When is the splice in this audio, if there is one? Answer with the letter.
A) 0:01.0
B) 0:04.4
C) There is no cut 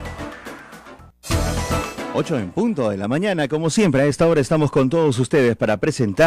A